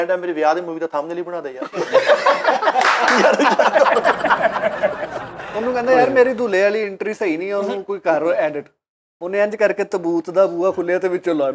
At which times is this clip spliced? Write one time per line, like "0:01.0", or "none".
none